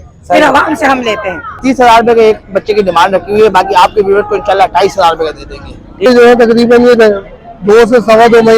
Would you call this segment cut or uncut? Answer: cut